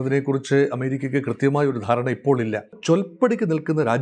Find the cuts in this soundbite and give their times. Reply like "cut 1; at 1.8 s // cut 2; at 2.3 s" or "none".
cut 1; at 2.8 s

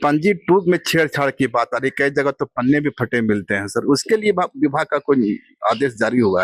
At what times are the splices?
none

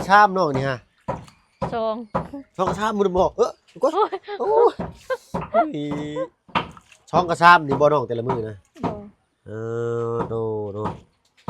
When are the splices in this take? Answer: cut 1; at 6.3 s

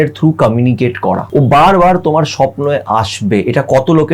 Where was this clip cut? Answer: cut 1; at 1.2 s

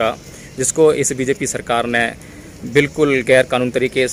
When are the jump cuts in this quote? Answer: none

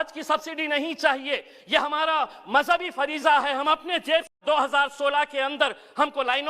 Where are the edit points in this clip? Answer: cut 1; at 4.3 s

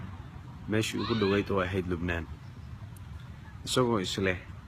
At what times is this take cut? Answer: cut 1; at 1.4 s

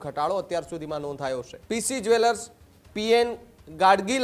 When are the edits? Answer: cut 1; at 1.5 s

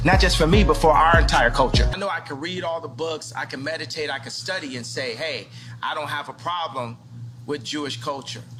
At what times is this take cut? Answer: none

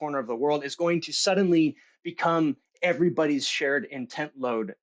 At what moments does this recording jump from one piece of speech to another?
none

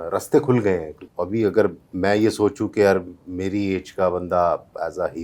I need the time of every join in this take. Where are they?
cut 1; at 1.1 s

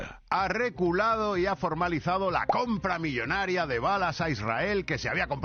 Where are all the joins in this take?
none

